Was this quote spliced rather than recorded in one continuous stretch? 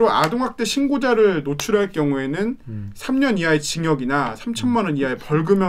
no; 0 cuts

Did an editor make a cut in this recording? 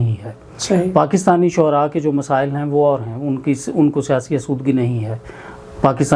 no; 0 cuts

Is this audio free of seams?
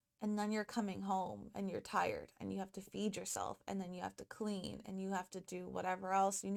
yes; 0 cuts

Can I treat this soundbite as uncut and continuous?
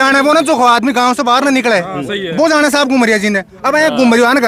yes; 0 cuts

